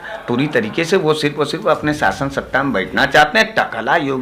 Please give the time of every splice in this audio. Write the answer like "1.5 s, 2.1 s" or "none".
none